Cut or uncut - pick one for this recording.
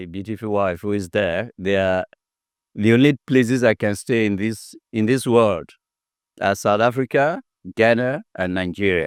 uncut